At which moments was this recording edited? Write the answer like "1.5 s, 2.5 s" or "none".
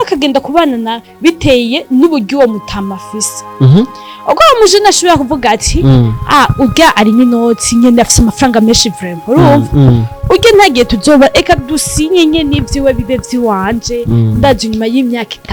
none